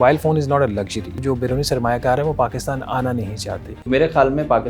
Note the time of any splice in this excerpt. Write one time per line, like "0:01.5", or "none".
0:01.2
0:03.8

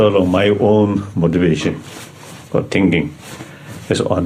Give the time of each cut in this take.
none

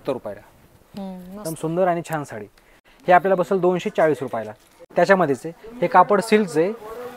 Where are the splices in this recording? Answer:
0:02.8
0:04.8

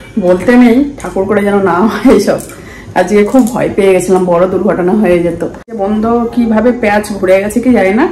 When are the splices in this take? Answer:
0:05.8

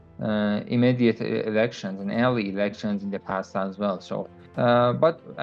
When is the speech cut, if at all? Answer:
0:04.4

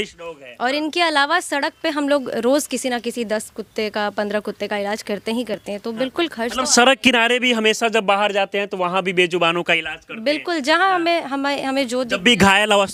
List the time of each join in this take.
none

